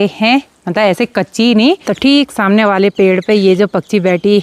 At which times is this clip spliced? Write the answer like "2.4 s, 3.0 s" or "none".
1.8 s